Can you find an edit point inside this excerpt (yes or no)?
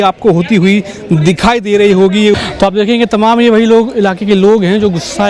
yes